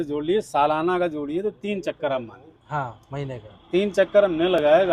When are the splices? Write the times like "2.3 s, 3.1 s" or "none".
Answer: none